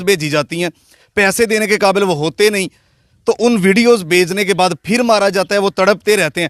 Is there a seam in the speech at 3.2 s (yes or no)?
no